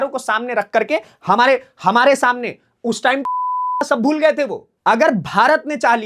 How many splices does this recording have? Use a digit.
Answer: 1